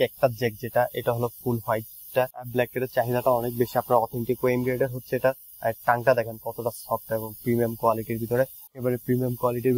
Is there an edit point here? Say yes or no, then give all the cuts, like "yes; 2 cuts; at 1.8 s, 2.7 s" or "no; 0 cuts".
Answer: yes; 2 cuts; at 2.4 s, 8.7 s